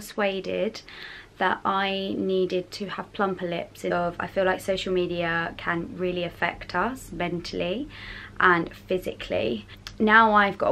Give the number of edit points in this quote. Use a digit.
2